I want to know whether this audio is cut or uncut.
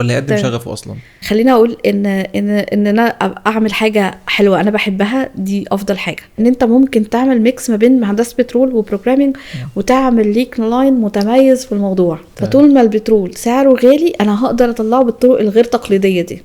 cut